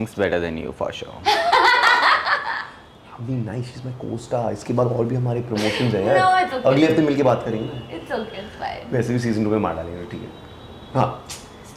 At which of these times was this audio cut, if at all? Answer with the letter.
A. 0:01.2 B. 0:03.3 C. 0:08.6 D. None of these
D